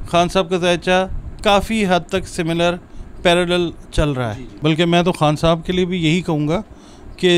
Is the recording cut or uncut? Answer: cut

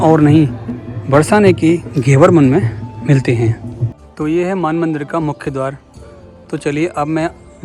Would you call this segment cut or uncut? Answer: cut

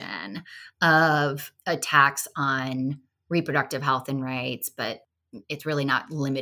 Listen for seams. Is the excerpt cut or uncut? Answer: cut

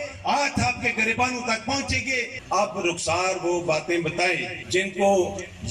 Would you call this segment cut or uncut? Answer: cut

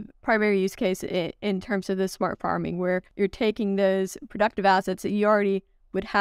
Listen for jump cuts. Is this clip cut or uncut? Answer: cut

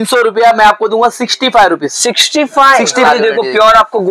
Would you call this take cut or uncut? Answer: cut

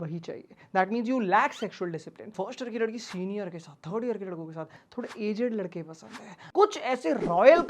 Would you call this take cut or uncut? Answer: cut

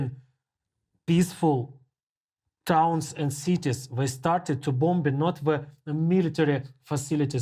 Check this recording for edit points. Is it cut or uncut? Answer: uncut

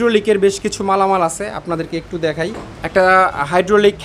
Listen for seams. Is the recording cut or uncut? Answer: cut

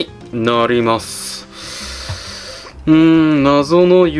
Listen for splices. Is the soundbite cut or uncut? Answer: uncut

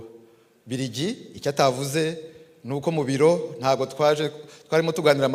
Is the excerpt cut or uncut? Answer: uncut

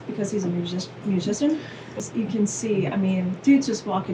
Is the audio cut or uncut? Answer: cut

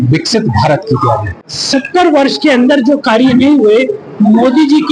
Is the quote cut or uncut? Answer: cut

